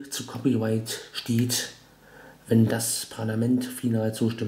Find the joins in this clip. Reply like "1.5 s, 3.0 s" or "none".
none